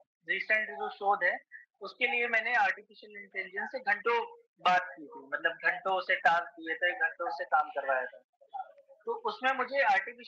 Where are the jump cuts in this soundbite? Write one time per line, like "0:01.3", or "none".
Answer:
none